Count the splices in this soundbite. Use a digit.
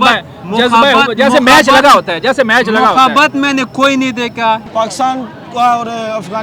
1